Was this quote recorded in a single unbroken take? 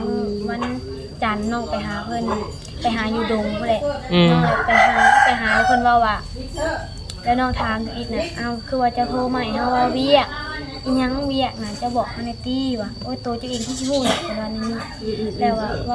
yes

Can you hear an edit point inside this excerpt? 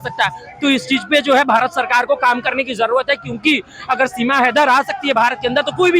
no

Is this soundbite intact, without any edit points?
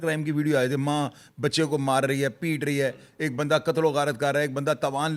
yes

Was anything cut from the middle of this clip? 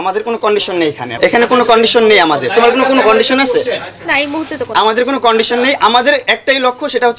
no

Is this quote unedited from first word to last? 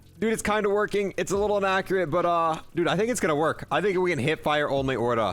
yes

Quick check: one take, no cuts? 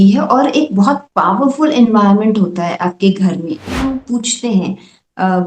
no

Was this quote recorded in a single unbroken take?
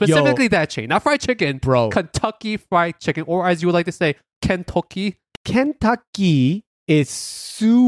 no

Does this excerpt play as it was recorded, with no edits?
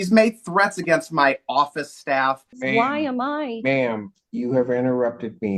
no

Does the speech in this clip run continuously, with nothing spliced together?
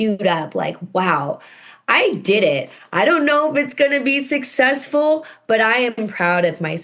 yes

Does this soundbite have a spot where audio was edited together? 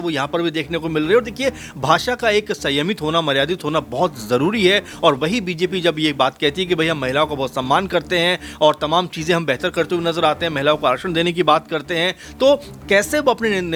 no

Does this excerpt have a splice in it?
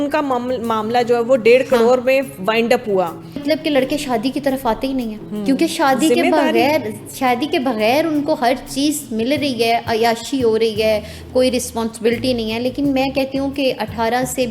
yes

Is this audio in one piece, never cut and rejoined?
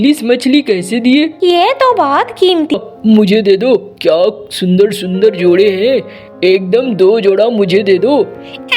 no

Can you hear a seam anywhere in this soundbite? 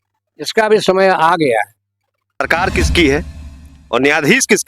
yes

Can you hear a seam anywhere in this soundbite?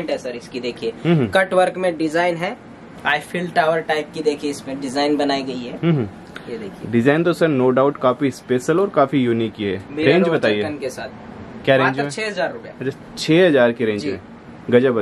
no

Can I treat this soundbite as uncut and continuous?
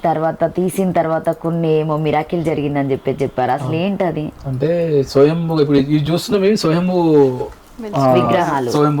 yes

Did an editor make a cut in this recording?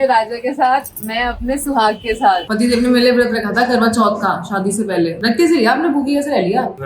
yes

